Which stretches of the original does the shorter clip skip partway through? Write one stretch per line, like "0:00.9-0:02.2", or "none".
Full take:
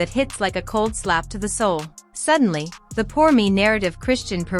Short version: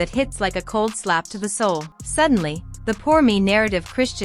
0:02.0-0:02.1

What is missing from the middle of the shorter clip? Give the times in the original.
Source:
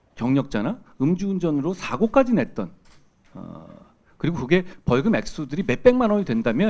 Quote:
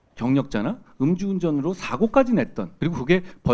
0:02.6-0:04.1

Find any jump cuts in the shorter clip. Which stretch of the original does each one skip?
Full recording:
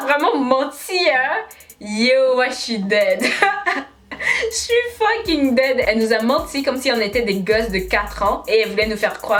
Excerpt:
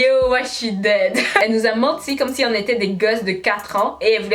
0:03.5-0:05.9

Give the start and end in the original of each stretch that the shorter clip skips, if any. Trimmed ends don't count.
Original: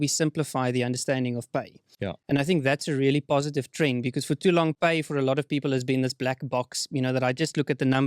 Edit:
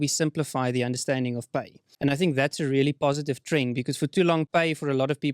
0:01.8-0:02.1

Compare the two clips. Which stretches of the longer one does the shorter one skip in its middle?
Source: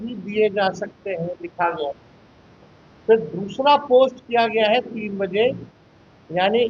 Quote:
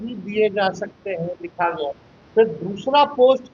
0:02.1-0:02.8

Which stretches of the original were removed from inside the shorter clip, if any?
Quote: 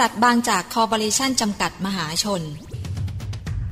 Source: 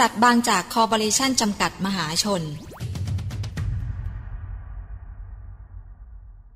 0:02.8-0:02.9

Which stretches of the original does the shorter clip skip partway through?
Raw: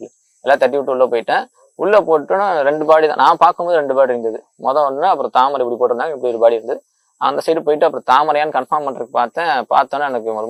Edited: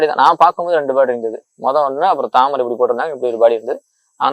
none

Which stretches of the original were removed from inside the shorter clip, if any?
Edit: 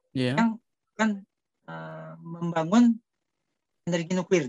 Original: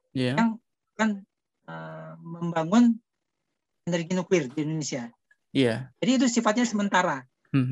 none

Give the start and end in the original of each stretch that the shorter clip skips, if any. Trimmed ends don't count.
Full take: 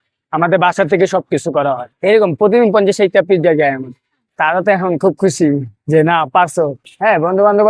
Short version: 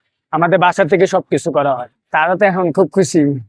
0:01.9-0:04.1

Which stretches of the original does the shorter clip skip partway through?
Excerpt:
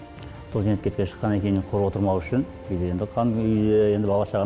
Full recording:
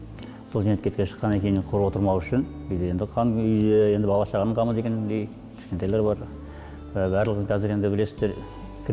none

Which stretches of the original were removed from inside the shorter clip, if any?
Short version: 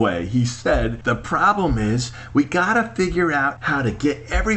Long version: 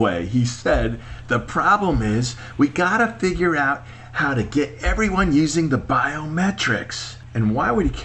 0:01.0-0:01.2
0:03.8-0:04.1

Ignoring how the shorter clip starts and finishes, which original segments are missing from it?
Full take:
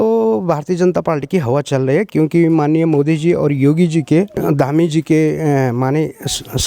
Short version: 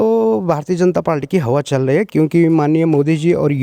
none

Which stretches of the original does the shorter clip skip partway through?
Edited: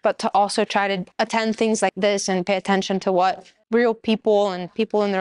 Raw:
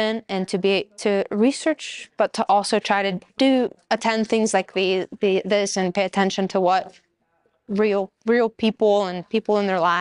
0:03.2-0:03.8
0:04.7-0:05.4
0:07.1-0:08.1

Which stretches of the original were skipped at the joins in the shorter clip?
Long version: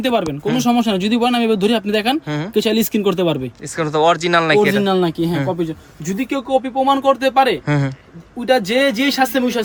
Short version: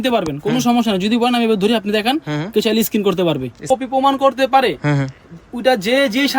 0:03.6-0:06.5

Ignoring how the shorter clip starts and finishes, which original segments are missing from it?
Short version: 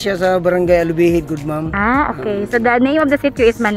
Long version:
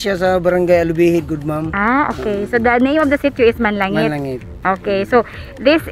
none

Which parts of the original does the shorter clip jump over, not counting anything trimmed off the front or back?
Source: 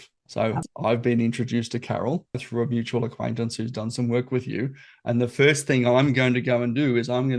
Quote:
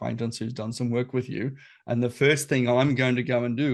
none

